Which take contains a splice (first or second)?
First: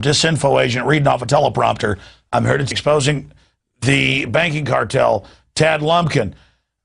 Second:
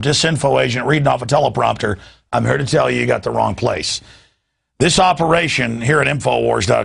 second